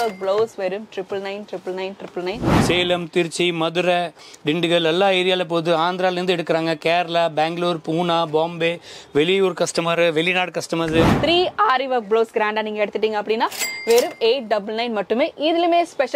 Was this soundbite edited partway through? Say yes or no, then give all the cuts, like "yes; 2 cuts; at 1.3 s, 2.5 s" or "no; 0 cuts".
yes; 2 cuts; at 2.5 s, 11.1 s